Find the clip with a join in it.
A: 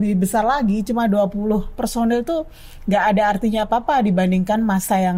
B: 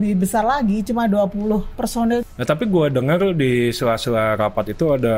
B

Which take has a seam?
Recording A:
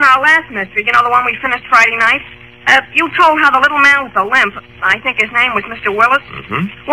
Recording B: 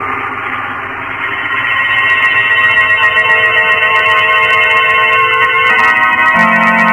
B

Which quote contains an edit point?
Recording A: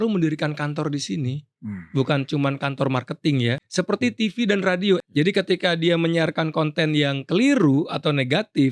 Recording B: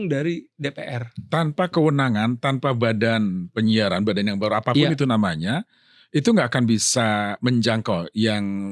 A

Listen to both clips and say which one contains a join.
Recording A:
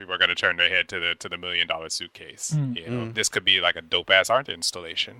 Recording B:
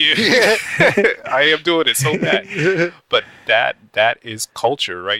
A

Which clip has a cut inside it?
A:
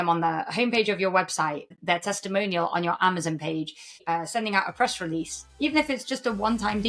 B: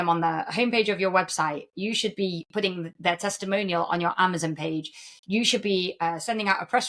A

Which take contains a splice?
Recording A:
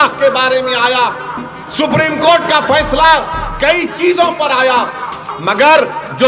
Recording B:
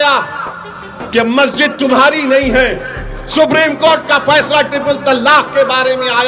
A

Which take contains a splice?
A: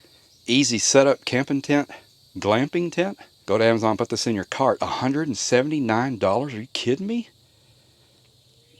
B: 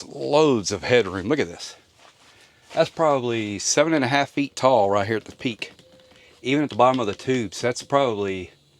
A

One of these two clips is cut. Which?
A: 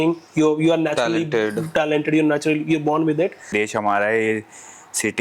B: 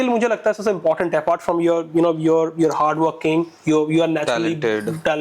A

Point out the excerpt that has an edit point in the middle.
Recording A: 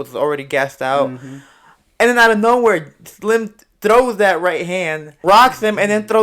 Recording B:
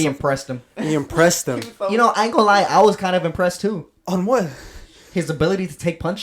A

